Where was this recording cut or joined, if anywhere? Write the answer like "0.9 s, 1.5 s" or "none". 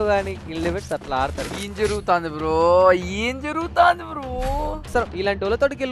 1.5 s